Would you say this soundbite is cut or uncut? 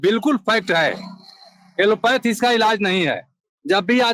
uncut